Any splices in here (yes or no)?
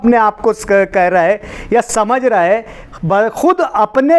no